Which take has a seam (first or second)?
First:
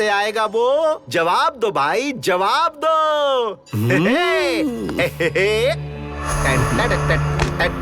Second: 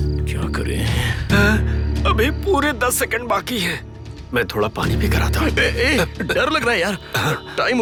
first